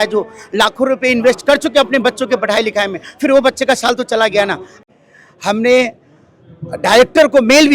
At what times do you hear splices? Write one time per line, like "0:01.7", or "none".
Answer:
0:04.8